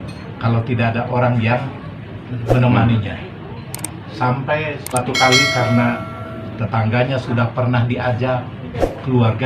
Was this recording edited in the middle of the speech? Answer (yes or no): yes